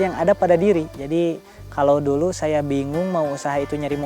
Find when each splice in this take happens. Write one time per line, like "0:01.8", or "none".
0:00.9